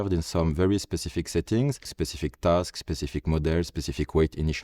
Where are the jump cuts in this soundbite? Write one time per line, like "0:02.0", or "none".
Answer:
0:01.9